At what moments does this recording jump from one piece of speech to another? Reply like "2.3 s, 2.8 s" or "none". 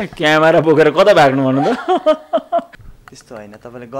2.8 s